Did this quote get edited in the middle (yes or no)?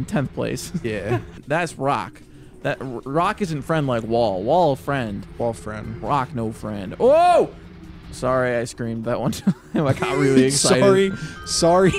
yes